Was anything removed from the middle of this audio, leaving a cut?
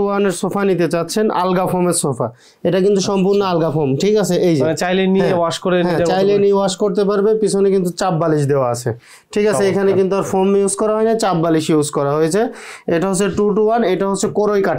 no; 0 cuts

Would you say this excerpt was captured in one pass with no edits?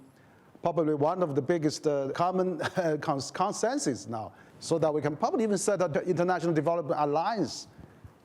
no; 2 cuts; at 2.1 s, 5.9 s

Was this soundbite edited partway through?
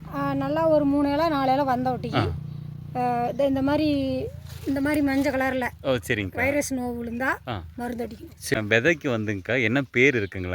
yes; 1 cut; at 8.5 s

